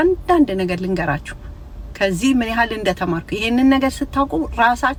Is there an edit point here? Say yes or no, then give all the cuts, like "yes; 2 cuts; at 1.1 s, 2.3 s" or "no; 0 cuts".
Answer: no; 0 cuts